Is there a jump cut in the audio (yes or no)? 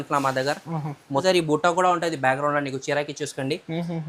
yes